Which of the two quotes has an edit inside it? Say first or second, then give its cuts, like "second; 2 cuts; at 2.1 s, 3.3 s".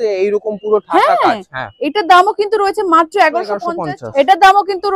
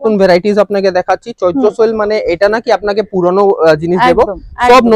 first; 1 cut; at 3.7 s